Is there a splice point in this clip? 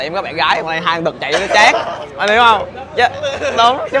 no; 0 cuts

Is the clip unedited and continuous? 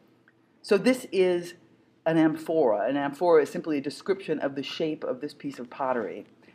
no; 1 cut; at 1.0 s

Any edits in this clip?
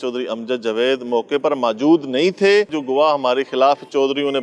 yes; 1 cut; at 2.7 s

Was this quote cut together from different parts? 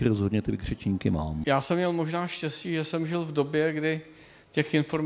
yes; 1 cut; at 1.4 s

